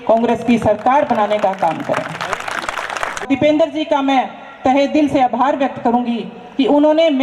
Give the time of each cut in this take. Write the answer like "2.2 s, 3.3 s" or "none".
3.2 s